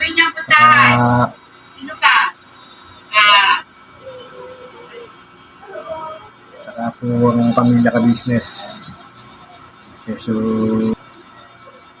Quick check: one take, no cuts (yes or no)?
no